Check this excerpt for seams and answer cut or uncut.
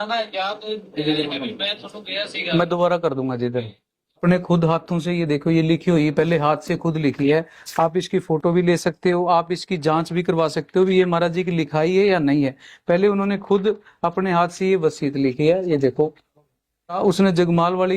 cut